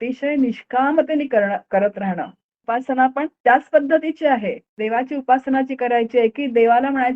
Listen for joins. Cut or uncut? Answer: cut